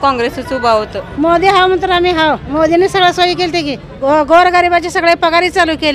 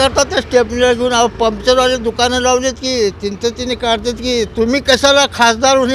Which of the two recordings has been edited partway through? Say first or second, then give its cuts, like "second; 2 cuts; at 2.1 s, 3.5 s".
first; 3 cuts; at 1.0 s, 2.5 s, 3.9 s